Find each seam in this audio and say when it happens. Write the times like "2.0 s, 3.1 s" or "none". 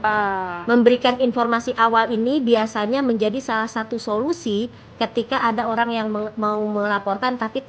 none